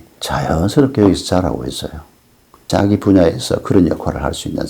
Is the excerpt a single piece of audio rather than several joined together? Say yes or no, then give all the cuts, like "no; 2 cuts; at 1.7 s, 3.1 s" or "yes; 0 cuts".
no; 1 cut; at 2.6 s